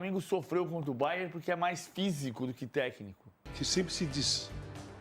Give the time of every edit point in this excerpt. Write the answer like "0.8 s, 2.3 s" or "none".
3.5 s